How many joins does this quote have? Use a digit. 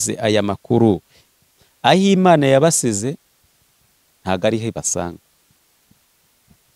1